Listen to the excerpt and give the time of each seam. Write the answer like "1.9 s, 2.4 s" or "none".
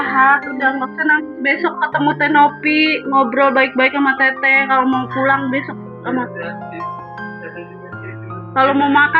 none